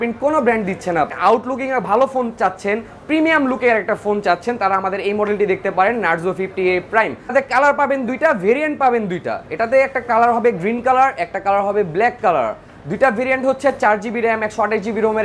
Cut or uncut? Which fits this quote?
cut